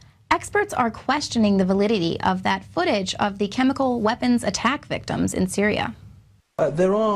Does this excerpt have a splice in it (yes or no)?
yes